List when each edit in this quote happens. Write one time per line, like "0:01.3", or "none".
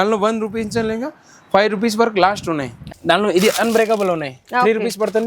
0:02.8